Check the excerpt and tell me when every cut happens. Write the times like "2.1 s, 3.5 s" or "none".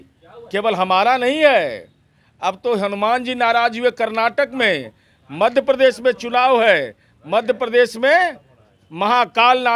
none